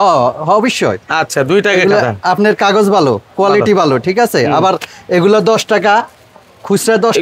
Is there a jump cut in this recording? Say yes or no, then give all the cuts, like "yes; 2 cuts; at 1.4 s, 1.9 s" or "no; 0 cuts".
no; 0 cuts